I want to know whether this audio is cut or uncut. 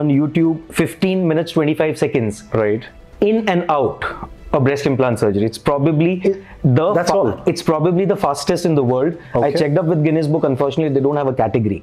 uncut